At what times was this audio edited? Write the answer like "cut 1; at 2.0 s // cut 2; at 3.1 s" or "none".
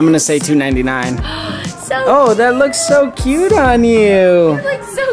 cut 1; at 1.3 s